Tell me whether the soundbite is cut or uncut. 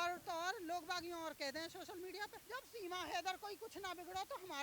cut